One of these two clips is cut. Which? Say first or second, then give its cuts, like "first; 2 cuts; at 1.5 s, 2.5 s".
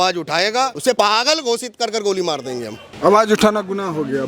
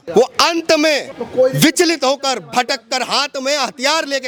first; 2 cuts; at 0.9 s, 2.9 s